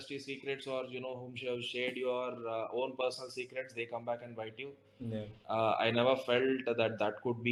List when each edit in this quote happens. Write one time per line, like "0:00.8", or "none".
none